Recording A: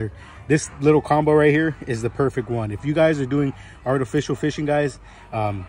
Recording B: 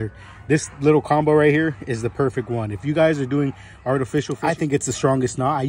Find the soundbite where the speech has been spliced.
B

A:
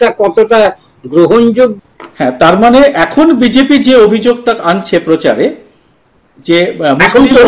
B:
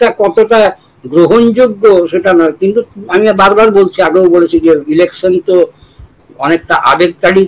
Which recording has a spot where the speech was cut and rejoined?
A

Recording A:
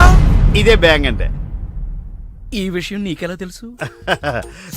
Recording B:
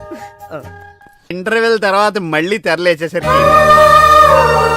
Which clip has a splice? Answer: B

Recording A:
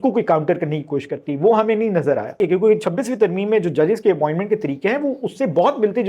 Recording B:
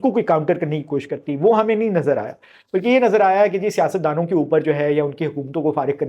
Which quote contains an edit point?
A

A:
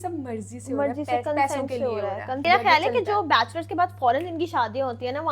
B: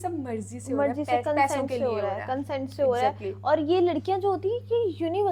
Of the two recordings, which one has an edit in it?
A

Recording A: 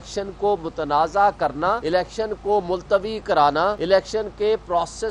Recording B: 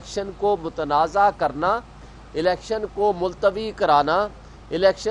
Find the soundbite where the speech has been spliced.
A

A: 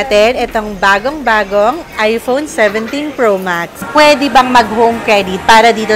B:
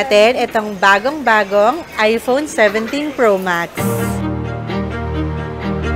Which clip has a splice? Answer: A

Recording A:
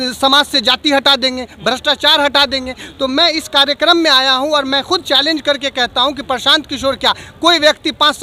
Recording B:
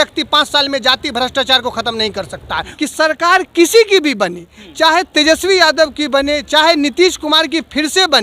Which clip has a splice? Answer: B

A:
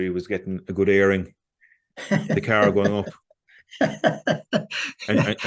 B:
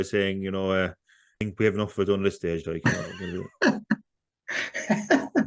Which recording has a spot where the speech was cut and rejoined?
B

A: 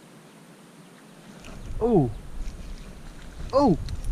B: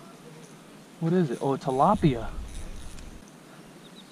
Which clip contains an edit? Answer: B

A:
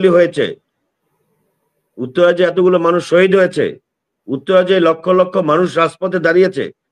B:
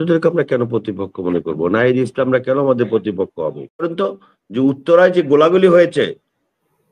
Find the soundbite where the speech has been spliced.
B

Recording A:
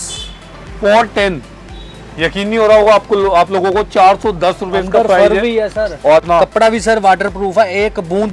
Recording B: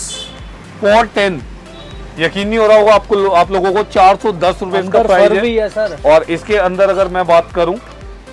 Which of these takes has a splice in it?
A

